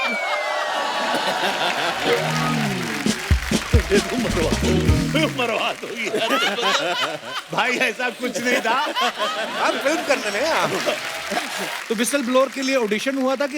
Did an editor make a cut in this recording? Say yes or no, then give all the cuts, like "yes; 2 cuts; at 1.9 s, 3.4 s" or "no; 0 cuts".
yes; 1 cut; at 11.7 s